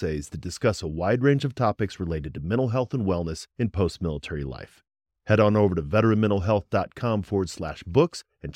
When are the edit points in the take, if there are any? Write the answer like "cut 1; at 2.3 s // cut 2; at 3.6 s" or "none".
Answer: none